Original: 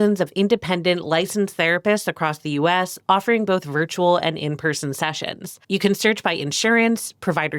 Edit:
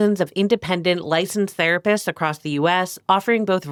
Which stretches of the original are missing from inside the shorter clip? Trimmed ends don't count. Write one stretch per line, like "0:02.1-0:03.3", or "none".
none